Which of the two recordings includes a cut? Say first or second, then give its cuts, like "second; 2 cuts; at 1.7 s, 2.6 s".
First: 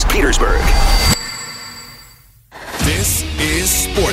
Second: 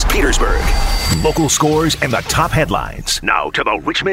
second; 1 cut; at 1.0 s